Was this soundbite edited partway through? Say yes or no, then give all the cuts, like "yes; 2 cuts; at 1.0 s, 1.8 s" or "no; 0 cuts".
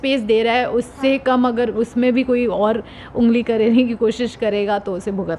no; 0 cuts